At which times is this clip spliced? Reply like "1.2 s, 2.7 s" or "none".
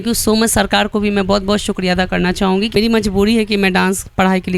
2.7 s